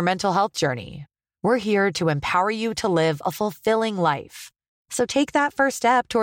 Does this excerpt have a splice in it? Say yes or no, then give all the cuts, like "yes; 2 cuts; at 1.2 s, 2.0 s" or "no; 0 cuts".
no; 0 cuts